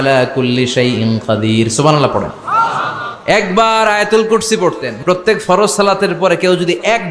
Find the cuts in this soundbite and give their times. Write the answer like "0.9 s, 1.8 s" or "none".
4.9 s